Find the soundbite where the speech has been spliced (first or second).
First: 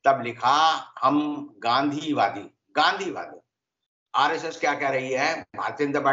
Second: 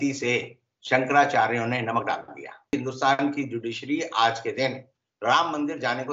second